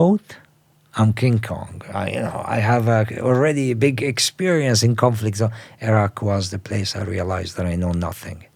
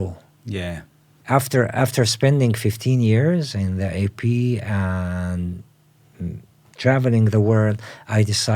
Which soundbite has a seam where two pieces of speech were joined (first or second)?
second